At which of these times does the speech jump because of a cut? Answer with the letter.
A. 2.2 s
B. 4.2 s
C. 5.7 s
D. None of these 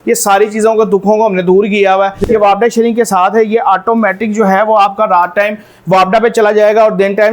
A